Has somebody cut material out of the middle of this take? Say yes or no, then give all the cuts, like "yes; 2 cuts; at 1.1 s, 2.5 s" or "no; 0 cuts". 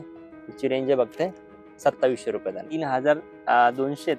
yes; 1 cut; at 2.7 s